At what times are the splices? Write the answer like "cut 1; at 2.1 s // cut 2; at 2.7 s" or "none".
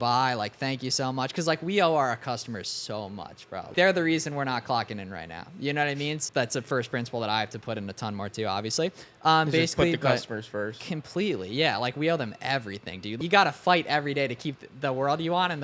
cut 1; at 3.7 s // cut 2; at 6.2 s // cut 3; at 13.2 s

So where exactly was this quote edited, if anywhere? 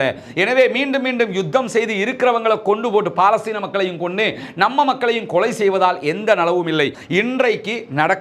cut 1; at 7.0 s

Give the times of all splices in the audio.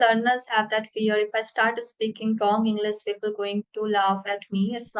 none

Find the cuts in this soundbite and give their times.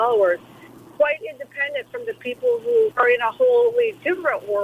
none

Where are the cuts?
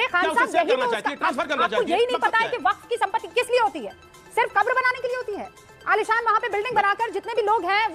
none

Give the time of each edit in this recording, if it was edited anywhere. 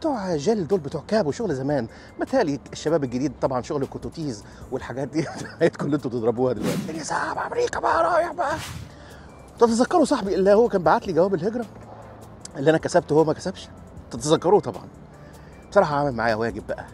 cut 1; at 6.9 s // cut 2; at 8.8 s

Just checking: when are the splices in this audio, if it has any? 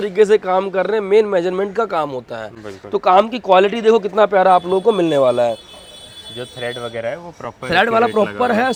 none

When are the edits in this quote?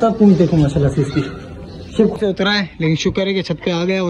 cut 1; at 2.1 s

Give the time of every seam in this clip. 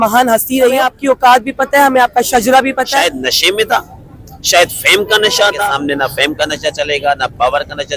cut 1; at 0.9 s // cut 2; at 3.1 s // cut 3; at 5.6 s

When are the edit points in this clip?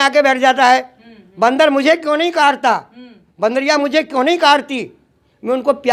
none

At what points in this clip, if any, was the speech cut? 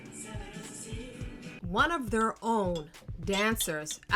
cut 1; at 1.6 s

